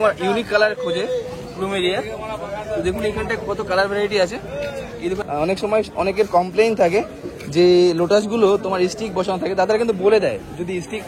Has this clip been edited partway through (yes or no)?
yes